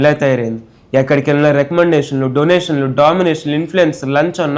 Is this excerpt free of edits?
yes; 0 cuts

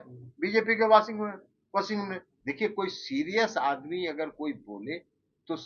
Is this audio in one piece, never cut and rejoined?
no; 1 cut; at 2.3 s

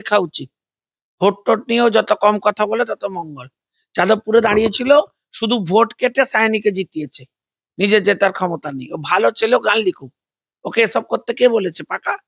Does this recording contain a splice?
no; 0 cuts

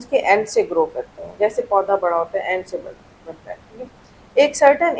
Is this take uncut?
yes; 0 cuts

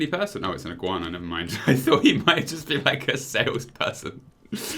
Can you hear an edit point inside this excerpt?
no; 0 cuts

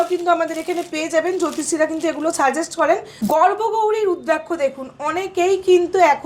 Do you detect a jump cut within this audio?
yes; 1 cut; at 3.1 s

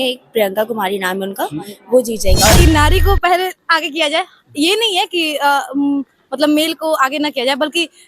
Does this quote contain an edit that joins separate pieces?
yes; 1 cut; at 2.6 s

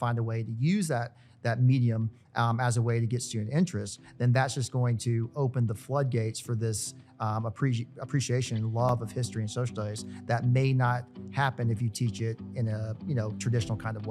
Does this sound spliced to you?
no; 0 cuts

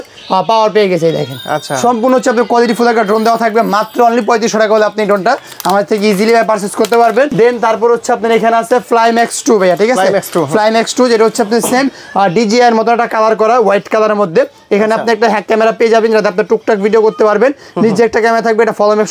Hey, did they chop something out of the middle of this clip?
no; 0 cuts

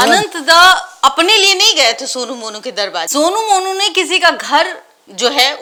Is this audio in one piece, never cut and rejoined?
yes; 0 cuts

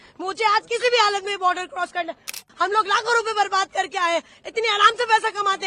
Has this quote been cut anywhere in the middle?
yes; 1 cut; at 2.4 s

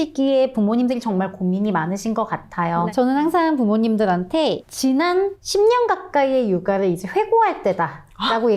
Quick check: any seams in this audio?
no; 0 cuts

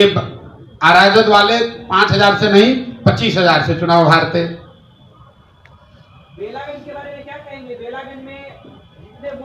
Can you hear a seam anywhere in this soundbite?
no; 0 cuts

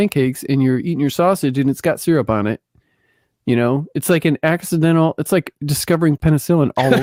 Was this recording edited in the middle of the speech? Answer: no; 0 cuts

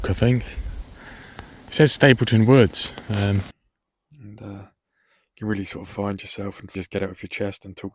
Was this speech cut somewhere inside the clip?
yes; 2 cuts; at 3.5 s, 6.7 s

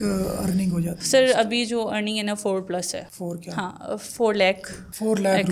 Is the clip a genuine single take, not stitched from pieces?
yes; 0 cuts

